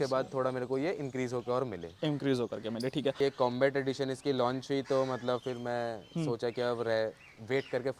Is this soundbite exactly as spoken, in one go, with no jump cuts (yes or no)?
no